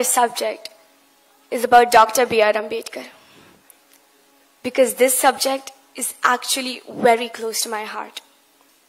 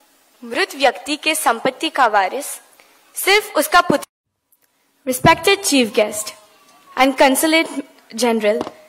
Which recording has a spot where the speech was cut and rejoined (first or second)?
second